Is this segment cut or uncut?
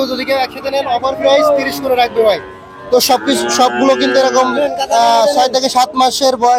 uncut